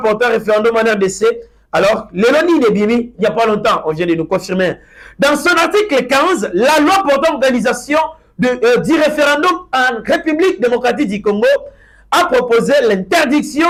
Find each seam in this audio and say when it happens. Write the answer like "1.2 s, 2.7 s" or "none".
none